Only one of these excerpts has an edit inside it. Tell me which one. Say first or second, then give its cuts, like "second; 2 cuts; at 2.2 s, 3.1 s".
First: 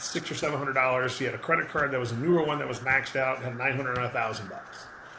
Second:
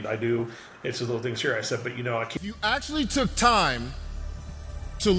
second; 1 cut; at 2.3 s